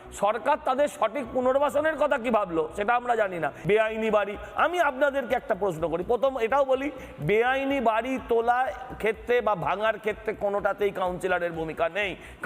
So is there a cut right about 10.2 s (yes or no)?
no